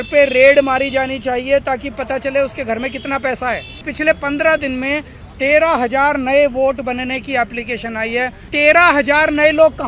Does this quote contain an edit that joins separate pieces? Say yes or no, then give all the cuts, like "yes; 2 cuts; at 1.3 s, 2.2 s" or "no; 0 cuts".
yes; 2 cuts; at 3.9 s, 8.5 s